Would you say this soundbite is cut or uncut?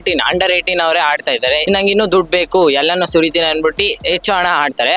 cut